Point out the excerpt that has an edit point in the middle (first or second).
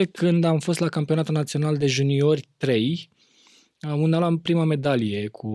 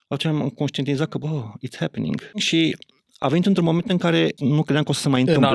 second